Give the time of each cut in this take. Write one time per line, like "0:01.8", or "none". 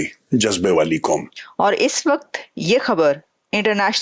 0:01.4